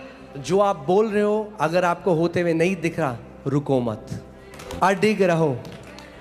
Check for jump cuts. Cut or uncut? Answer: cut